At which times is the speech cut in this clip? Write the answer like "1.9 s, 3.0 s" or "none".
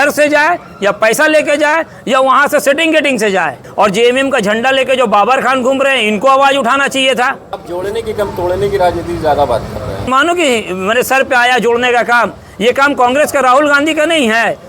3.6 s, 7.5 s, 10.1 s